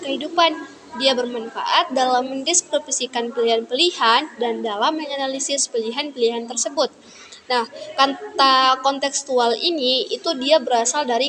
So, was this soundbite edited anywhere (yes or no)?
no